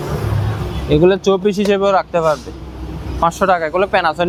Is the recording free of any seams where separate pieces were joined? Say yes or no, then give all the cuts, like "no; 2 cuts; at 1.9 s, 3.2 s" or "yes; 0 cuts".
yes; 0 cuts